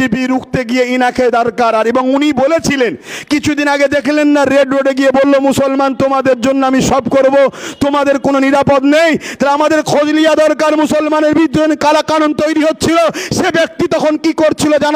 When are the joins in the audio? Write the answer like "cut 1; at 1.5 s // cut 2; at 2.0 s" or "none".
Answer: none